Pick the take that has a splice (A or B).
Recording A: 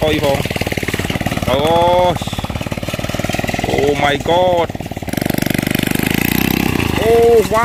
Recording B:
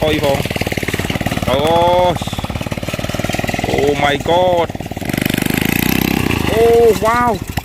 B